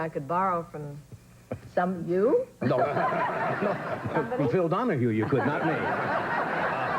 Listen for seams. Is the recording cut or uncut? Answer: cut